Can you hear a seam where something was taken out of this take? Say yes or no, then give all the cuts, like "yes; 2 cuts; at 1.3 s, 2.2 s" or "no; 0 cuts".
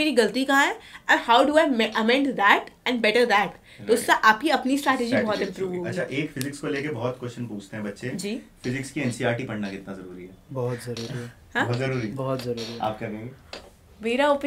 no; 0 cuts